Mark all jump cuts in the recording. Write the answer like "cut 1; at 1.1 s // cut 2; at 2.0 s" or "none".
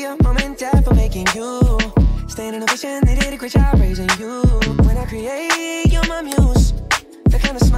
none